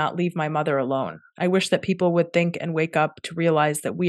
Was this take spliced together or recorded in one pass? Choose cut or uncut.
uncut